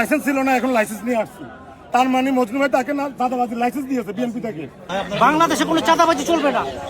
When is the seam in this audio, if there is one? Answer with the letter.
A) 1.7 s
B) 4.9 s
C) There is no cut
B